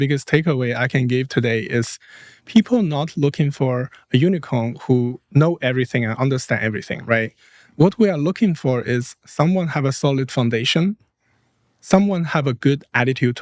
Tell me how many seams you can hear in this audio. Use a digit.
0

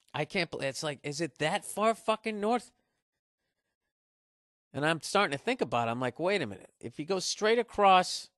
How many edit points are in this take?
1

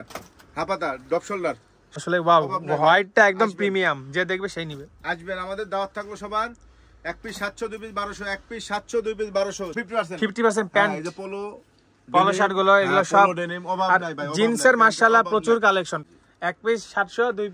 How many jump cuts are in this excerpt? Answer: 3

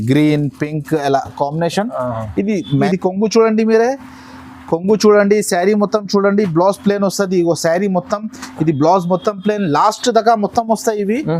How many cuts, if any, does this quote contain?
1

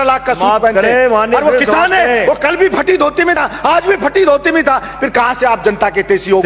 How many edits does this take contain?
0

